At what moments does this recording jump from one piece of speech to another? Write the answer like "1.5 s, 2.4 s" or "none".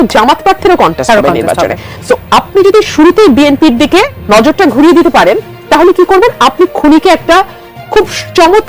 4.2 s